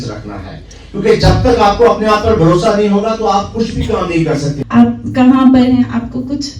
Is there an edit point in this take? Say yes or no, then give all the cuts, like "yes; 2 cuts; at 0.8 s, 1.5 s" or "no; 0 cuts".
yes; 1 cut; at 4.6 s